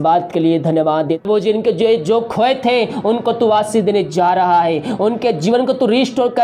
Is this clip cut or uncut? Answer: cut